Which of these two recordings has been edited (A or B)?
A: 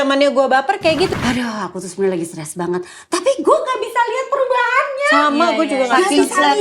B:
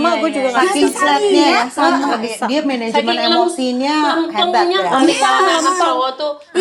A